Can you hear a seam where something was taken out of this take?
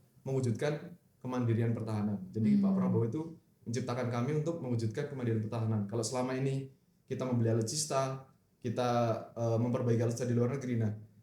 no; 0 cuts

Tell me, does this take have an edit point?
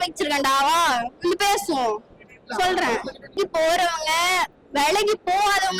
yes; 1 cut; at 3.4 s

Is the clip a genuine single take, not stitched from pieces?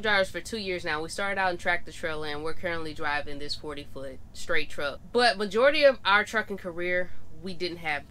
no; 1 cut; at 5.0 s

